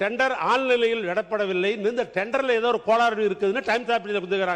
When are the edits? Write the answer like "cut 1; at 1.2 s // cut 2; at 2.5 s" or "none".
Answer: none